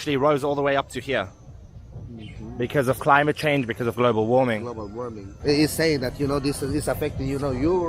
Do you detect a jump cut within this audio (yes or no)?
no